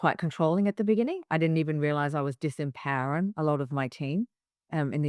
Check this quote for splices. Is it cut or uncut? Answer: uncut